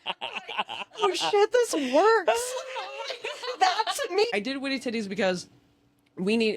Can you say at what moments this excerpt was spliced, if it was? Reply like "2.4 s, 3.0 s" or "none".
4.3 s